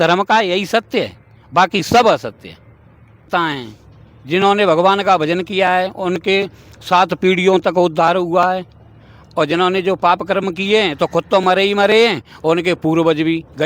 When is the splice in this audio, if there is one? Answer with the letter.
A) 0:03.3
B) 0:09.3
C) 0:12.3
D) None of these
A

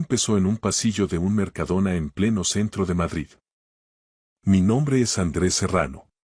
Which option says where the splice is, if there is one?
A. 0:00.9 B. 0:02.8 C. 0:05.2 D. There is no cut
A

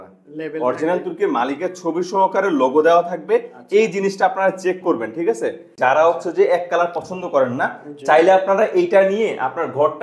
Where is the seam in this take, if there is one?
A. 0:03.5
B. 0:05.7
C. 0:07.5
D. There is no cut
B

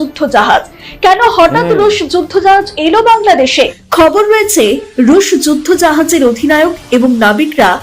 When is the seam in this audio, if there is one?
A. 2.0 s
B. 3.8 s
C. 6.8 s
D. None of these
B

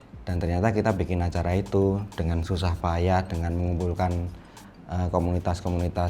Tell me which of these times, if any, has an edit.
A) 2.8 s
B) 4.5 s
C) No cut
C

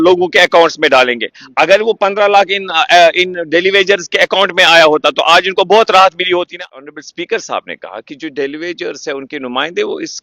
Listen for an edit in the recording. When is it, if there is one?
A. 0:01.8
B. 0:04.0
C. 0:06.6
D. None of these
C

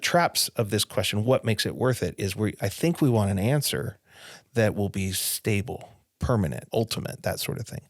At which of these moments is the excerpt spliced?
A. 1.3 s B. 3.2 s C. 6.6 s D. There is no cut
C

